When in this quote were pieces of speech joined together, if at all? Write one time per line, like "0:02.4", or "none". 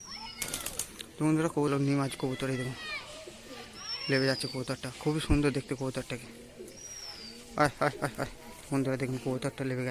0:01.7

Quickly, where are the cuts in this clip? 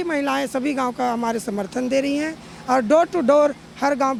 none

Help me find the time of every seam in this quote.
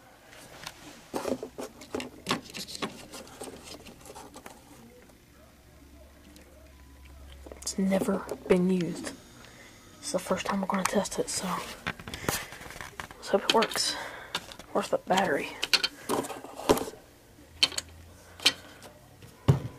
0:15.3

